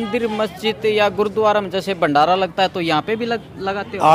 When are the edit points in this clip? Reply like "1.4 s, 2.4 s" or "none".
none